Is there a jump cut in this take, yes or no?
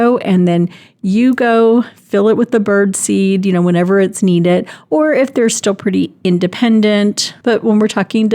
yes